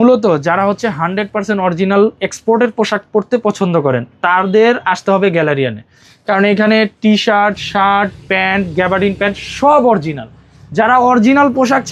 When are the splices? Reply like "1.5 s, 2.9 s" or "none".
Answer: none